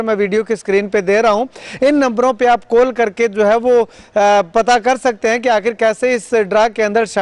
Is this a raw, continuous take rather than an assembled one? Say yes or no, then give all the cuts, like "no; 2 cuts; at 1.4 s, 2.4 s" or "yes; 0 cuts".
yes; 0 cuts